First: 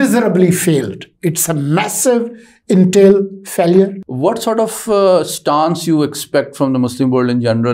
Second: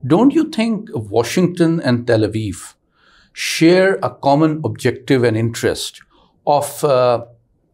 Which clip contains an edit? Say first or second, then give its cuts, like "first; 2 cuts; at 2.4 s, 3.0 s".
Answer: first; 1 cut; at 4.0 s